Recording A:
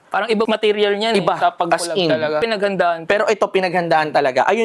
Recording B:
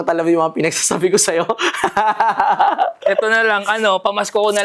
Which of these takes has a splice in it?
A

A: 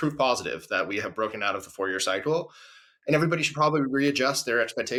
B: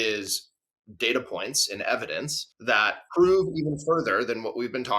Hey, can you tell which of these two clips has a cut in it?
B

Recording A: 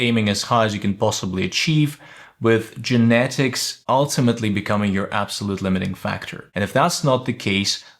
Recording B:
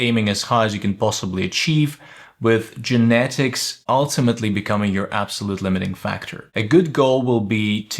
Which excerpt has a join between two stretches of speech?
A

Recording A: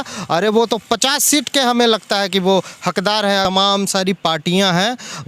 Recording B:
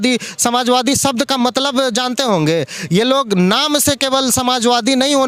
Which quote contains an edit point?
A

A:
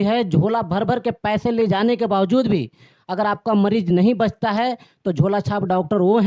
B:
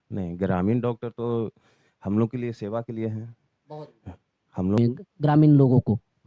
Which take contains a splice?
B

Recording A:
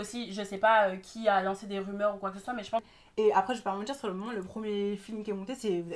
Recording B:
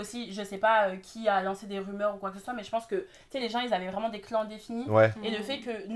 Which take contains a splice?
A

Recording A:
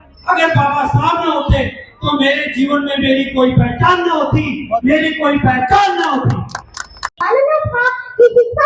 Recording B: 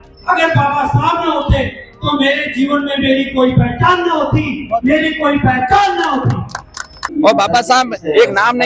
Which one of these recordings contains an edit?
B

